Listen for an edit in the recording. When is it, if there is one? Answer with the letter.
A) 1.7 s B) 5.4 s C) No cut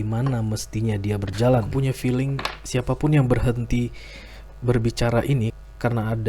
A